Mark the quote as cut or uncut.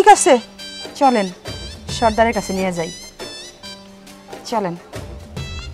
uncut